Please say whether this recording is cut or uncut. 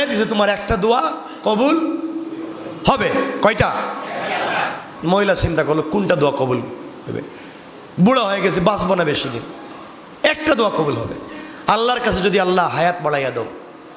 uncut